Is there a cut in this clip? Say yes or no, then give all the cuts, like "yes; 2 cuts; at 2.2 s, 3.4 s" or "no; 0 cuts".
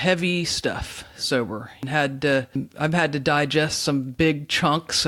yes; 2 cuts; at 1.8 s, 2.6 s